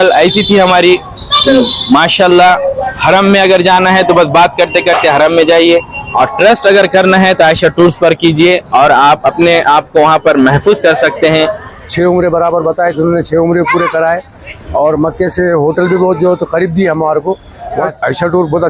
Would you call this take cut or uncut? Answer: cut